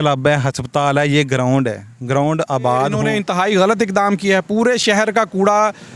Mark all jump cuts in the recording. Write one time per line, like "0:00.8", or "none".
0:03.1